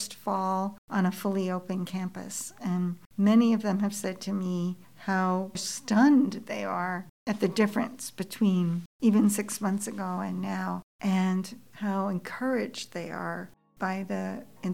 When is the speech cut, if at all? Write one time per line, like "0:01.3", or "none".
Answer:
none